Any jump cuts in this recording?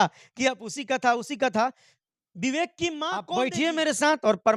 yes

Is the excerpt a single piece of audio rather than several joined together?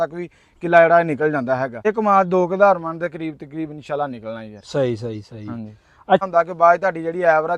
no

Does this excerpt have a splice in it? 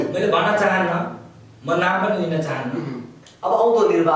yes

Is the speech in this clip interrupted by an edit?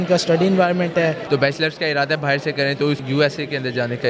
yes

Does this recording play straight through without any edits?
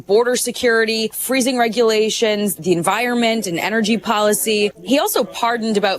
no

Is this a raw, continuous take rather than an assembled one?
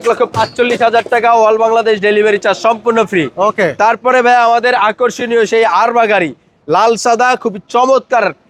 yes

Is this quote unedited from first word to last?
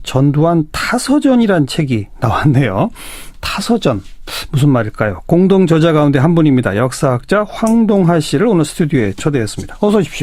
no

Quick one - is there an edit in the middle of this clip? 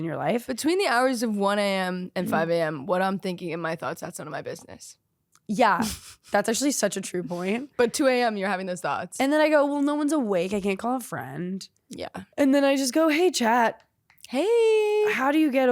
yes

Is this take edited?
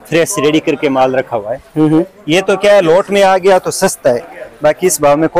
no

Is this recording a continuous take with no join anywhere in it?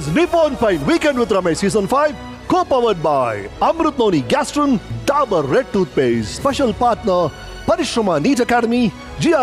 yes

